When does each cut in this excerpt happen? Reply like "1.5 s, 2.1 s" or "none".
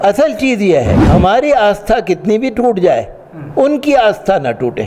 1.0 s

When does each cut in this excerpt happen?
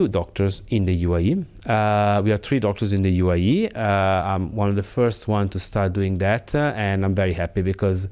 none

